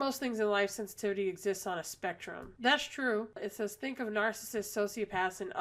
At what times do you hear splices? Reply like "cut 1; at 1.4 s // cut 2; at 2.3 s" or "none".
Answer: cut 1; at 3.4 s